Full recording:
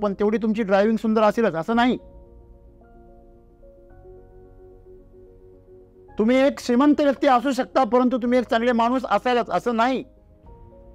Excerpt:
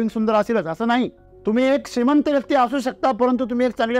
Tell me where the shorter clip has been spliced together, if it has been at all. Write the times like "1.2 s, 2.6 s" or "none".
1.2 s